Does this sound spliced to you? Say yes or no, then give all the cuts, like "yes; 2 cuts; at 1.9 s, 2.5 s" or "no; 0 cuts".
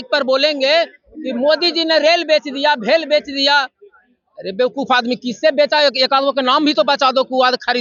no; 0 cuts